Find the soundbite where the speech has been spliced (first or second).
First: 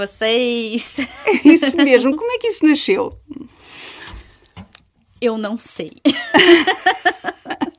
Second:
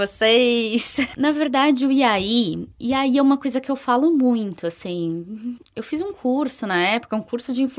second